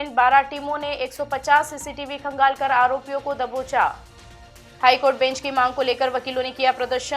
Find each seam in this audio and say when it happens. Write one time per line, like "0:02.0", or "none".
none